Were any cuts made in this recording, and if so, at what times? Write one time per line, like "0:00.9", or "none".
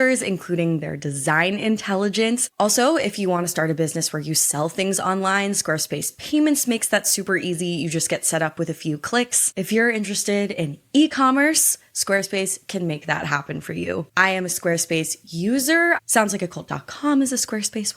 0:02.4
0:09.5
0:16.0